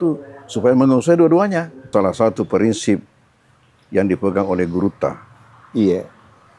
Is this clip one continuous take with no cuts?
no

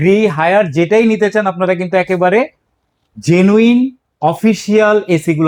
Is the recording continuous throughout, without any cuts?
yes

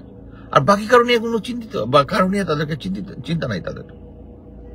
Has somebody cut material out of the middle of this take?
no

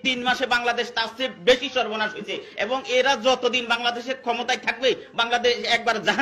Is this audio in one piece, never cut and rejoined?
yes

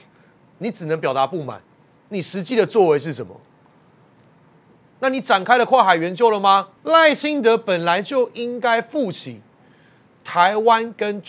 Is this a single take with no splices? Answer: no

